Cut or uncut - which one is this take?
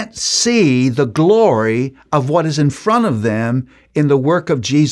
uncut